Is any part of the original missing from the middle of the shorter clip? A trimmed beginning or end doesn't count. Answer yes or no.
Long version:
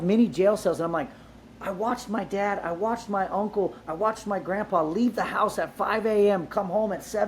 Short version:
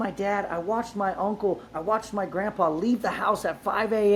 no